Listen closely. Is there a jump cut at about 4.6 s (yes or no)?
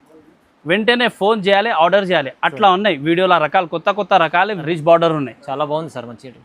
yes